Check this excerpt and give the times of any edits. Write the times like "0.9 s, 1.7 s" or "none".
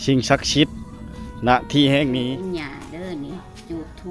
2.3 s